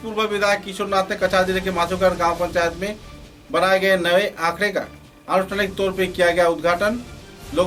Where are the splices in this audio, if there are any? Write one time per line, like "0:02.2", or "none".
none